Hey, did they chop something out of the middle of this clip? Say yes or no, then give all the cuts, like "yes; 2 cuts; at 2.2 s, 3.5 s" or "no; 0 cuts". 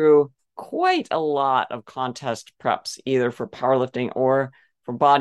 no; 0 cuts